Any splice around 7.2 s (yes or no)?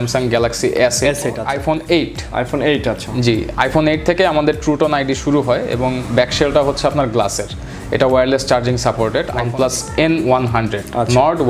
no